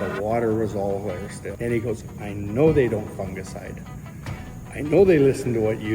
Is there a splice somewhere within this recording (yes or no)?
yes